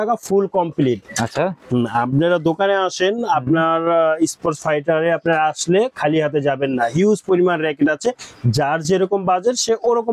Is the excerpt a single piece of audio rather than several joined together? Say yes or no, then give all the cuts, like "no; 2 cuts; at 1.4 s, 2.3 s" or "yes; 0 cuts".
yes; 0 cuts